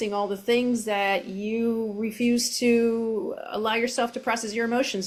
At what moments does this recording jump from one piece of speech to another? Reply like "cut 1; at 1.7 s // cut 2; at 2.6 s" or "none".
none

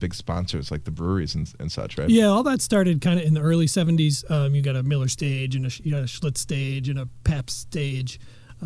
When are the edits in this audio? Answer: none

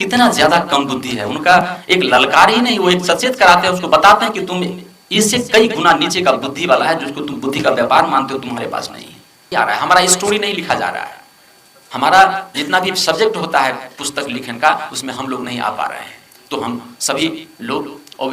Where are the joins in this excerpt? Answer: cut 1; at 9.5 s

